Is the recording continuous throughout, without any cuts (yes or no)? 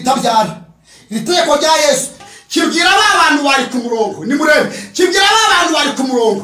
no